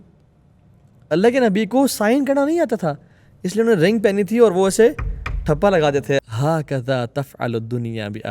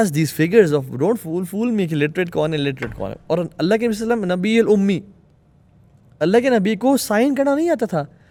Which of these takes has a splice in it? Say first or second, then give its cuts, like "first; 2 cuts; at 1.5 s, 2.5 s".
first; 1 cut; at 6.2 s